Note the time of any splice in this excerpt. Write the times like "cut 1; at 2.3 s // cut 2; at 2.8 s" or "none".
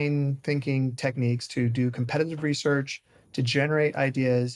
none